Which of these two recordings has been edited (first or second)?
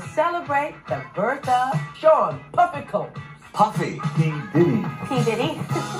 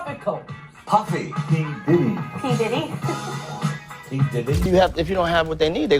second